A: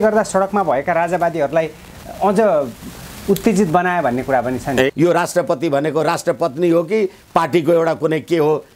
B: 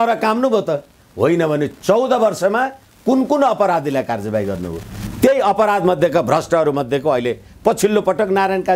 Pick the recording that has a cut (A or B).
A